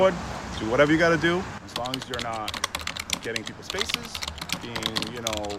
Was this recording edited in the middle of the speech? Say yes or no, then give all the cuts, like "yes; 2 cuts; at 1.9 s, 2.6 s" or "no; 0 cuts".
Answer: no; 0 cuts